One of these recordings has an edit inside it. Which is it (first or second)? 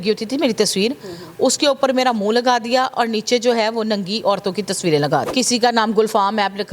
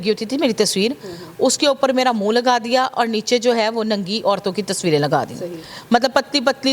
first